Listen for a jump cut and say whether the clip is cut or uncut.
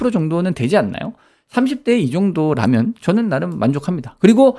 uncut